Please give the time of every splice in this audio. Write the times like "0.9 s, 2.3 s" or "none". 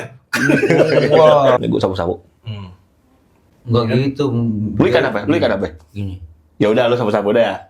1.6 s